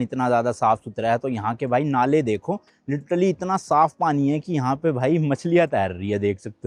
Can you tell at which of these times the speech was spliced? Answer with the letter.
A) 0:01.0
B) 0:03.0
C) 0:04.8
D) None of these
D